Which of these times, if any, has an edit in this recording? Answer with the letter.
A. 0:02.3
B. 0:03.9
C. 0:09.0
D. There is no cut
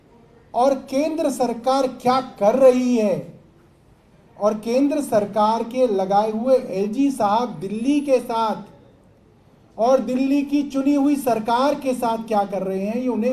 D